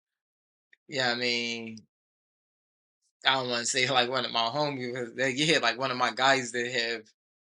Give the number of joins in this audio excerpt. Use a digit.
0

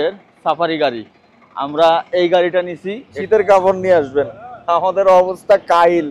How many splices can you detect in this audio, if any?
1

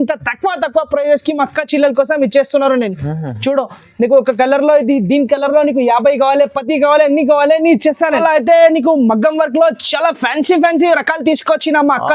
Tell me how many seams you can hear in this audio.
1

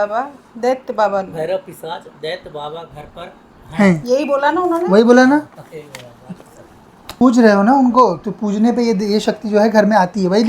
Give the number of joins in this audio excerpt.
1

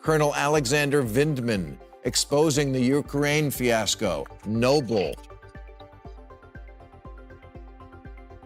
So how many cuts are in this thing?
1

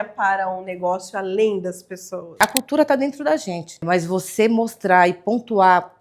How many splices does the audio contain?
2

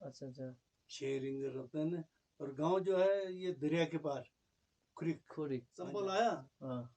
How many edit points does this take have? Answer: 1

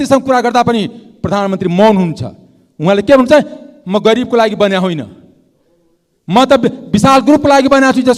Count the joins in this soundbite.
0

